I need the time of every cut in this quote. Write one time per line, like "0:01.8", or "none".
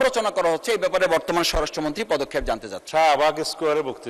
0:02.7